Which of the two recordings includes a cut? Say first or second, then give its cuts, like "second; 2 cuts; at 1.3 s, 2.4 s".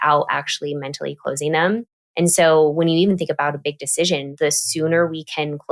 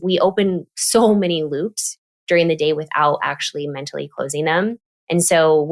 first; 1 cut; at 4.3 s